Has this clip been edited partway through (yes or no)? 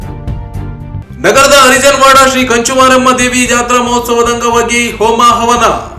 no